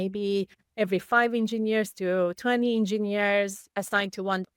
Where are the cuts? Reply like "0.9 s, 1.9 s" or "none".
3.6 s